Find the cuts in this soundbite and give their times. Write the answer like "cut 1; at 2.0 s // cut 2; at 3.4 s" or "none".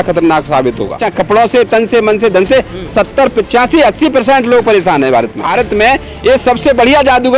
cut 1; at 1.1 s // cut 2; at 5.5 s